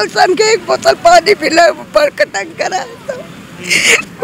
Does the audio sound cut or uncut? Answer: uncut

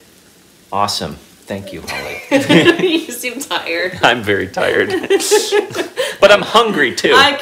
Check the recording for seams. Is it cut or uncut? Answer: uncut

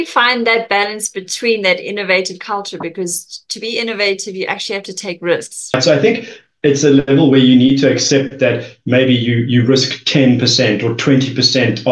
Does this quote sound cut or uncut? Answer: cut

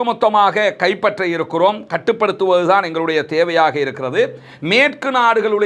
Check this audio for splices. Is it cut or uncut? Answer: uncut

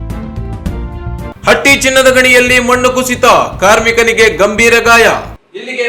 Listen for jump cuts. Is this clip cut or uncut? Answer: uncut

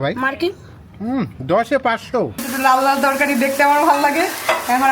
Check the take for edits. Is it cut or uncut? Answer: cut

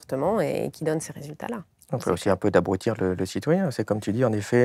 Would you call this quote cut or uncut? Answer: uncut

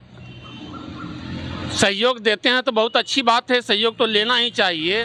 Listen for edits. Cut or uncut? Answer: uncut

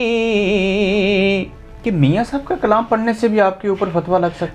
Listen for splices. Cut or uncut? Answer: cut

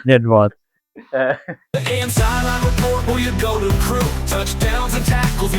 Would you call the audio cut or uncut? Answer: cut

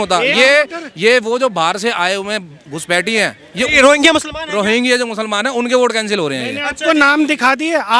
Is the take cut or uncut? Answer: uncut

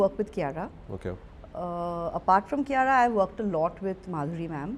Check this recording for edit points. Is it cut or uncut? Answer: uncut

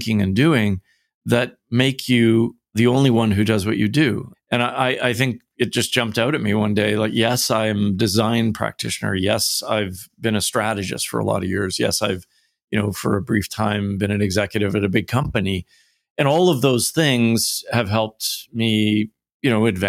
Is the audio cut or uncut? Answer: cut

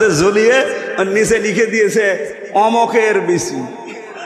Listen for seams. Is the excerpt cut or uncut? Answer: uncut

